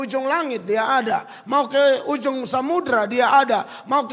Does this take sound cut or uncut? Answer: uncut